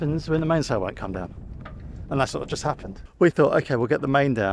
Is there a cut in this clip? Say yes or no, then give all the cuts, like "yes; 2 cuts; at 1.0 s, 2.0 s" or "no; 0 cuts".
yes; 1 cut; at 3.0 s